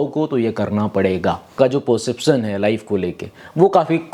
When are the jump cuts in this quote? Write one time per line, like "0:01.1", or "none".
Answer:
0:01.5